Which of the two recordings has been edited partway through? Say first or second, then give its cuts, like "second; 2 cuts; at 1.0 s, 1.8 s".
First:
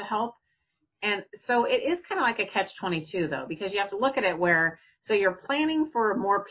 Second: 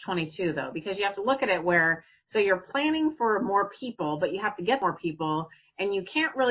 second; 1 cut; at 4.8 s